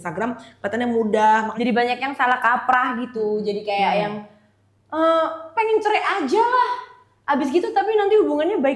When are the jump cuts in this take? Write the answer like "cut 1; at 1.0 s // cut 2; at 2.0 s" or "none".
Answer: cut 1; at 1.5 s